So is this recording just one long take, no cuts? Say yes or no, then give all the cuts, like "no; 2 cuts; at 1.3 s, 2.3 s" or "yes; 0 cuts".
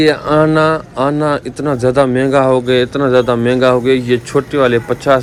yes; 0 cuts